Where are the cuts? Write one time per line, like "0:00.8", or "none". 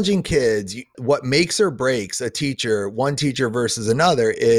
0:01.0